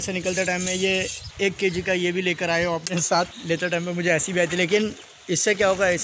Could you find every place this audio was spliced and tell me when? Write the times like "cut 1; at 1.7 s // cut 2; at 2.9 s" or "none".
cut 1; at 1.2 s // cut 2; at 3.4 s